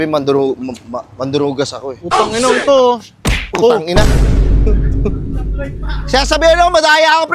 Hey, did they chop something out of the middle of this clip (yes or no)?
no